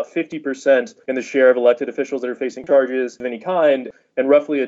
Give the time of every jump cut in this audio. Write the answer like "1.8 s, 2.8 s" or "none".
1.0 s